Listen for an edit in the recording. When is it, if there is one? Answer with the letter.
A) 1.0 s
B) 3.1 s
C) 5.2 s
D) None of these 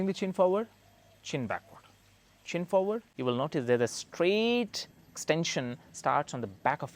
B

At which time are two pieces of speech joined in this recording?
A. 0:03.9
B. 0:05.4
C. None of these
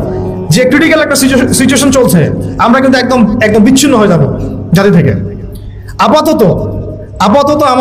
C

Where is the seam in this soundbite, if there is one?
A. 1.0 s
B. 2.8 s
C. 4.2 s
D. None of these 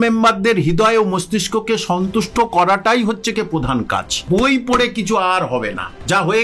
C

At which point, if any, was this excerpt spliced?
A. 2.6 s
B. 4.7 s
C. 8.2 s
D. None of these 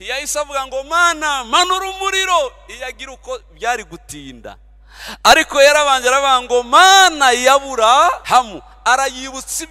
C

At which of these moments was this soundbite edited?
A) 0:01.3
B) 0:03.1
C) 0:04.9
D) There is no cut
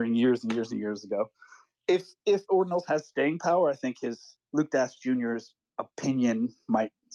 D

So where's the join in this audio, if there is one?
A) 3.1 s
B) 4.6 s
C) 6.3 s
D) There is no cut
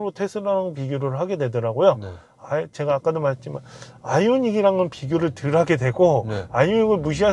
D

